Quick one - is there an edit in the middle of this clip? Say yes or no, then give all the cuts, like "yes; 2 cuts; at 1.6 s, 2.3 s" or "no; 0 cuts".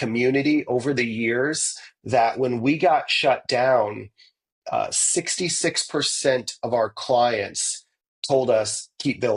no; 0 cuts